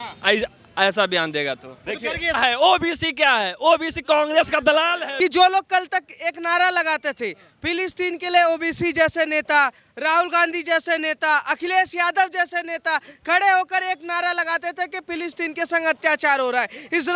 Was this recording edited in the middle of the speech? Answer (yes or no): yes